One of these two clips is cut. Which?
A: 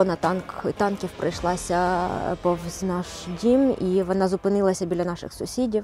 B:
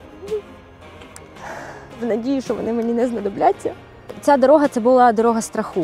B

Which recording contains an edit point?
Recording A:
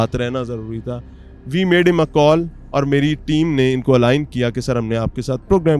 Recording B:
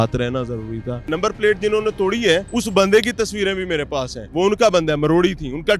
B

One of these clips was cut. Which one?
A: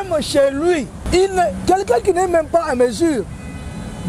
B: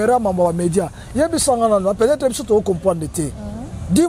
A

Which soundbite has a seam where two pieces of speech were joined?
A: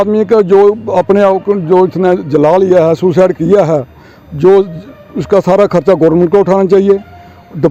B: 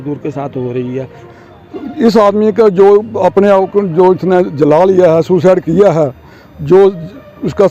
B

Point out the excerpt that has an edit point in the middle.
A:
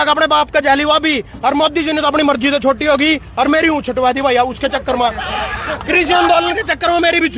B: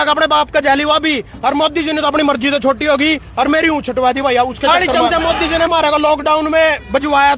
B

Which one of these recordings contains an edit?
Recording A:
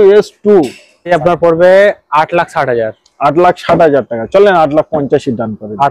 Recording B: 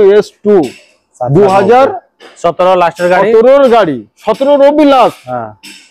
A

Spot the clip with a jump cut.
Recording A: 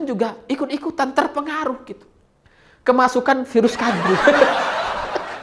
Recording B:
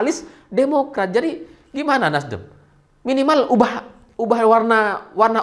A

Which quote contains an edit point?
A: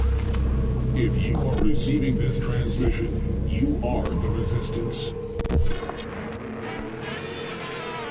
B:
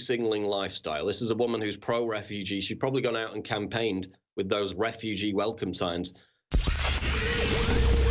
B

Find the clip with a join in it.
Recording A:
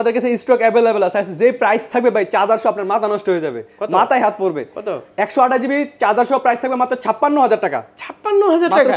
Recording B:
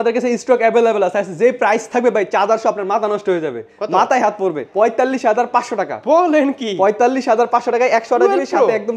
B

